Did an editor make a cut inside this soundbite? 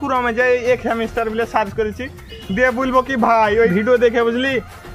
yes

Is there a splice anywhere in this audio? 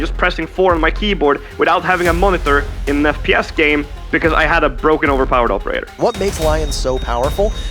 yes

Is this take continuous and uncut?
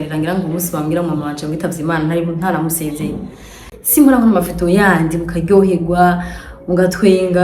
no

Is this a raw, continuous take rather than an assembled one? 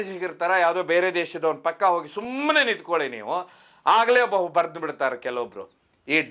yes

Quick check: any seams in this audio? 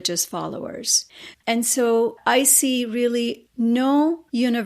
yes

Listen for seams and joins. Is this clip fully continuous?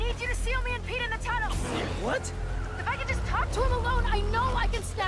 yes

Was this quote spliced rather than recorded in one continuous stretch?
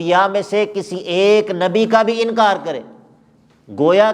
no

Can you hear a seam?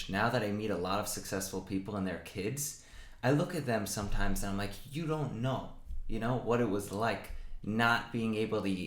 no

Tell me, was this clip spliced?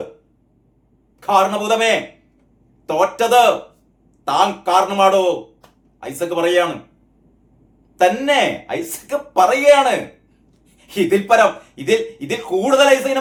no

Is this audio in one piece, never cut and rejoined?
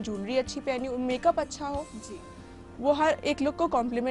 yes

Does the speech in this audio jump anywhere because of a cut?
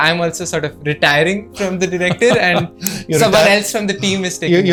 no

